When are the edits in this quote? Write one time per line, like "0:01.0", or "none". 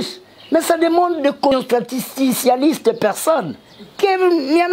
0:01.5